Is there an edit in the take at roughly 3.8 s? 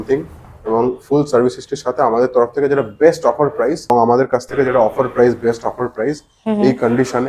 yes; 1 cut; at 3.8 s

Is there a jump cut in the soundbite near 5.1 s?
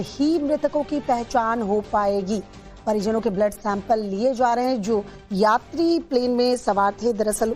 no; 1 cut; at 1.9 s

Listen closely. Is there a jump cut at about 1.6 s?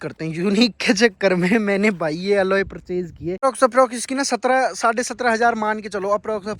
no; 1 cut; at 3.4 s

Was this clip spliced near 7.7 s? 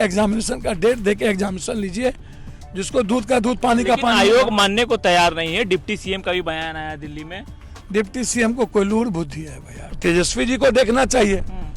no; 1 cut; at 9.9 s

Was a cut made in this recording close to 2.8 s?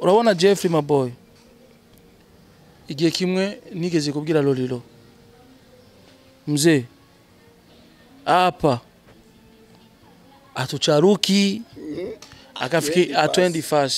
no; 0 cuts

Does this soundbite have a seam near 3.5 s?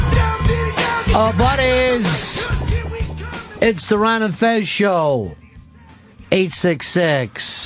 yes; 1 cut; at 3.5 s

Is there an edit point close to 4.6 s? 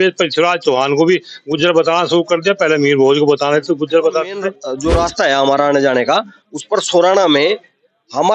yes; 1 cut; at 4.6 s

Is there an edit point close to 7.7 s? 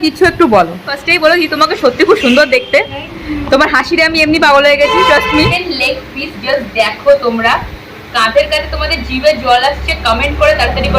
no; 2 cuts; at 1.0 s, 5.5 s

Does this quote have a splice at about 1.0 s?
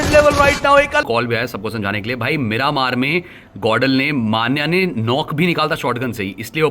yes; 1 cut; at 1.0 s

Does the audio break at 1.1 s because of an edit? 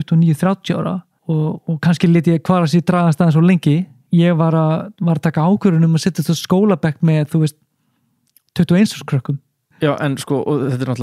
yes; 3 cuts; at 1.1 s, 4.0 s, 9.7 s

